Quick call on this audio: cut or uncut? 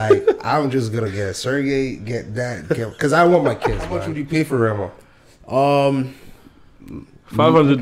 cut